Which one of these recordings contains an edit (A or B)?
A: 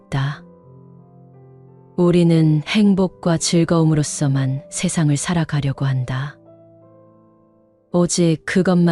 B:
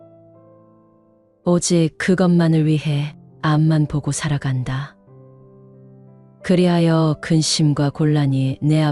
B